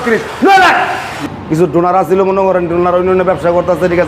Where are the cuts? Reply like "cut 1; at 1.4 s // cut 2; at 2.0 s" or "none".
cut 1; at 1.2 s

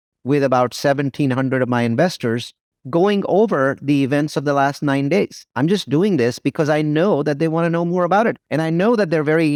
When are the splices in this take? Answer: none

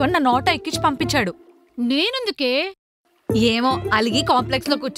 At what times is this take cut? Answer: none

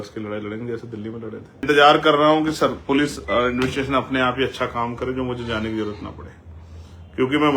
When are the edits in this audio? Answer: cut 1; at 1.6 s

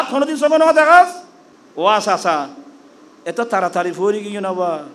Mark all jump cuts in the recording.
cut 1; at 1.1 s

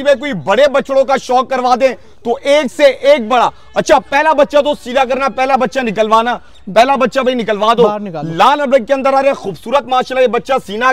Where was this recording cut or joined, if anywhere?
none

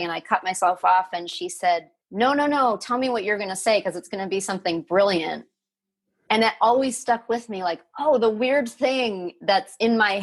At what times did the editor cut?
cut 1; at 2.0 s

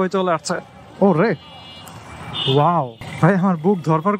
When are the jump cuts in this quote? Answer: cut 1; at 3.0 s

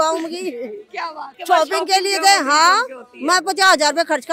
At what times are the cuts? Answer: cut 1; at 1.2 s

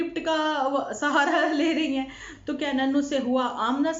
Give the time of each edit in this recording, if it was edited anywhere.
cut 1; at 2.3 s

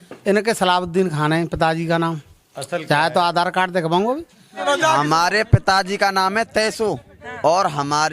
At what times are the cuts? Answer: cut 1; at 4.6 s

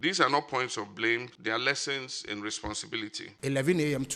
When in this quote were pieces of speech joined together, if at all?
cut 1; at 1.3 s // cut 2; at 2.9 s

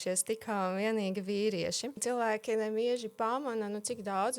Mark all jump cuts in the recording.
cut 1; at 2.0 s

